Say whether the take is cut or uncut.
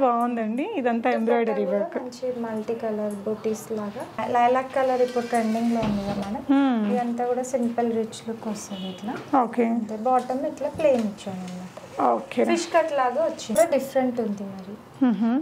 cut